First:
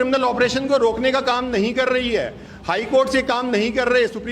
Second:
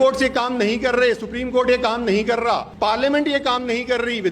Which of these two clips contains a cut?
second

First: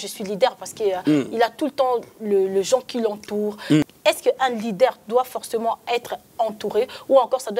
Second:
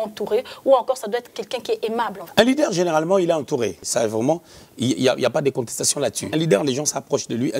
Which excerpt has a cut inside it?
second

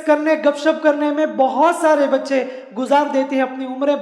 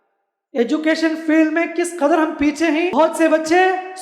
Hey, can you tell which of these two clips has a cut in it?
second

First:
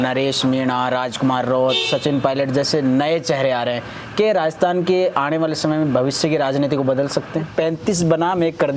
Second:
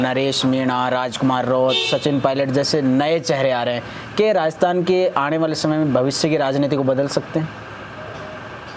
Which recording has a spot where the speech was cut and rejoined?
first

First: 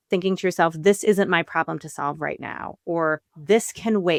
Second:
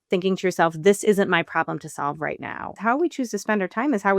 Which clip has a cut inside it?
second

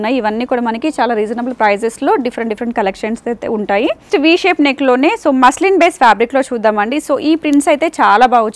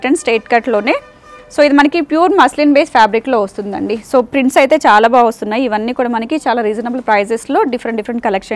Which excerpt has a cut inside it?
first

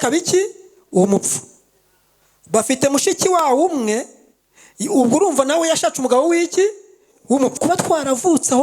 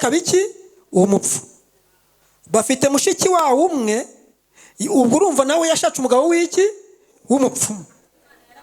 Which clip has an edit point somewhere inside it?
first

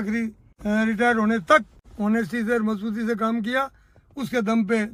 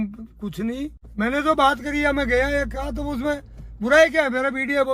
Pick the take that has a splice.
second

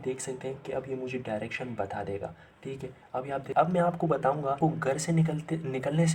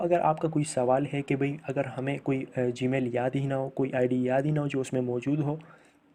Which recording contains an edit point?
first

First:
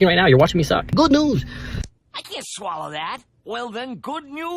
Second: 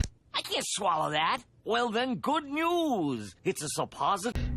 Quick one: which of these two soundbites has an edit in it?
first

